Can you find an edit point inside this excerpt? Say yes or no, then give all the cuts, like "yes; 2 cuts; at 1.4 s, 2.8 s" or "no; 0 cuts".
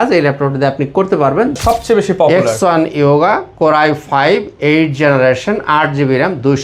yes; 1 cut; at 1.6 s